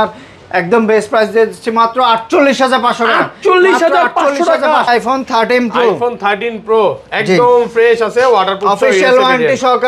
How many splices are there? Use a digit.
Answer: 1